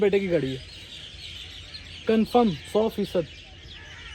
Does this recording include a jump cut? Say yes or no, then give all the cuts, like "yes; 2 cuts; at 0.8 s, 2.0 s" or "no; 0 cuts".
no; 0 cuts